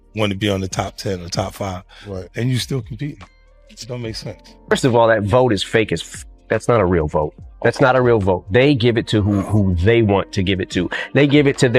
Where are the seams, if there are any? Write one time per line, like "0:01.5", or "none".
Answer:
0:04.7